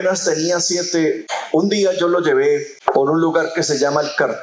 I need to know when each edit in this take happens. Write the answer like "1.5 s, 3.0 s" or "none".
1.3 s, 2.7 s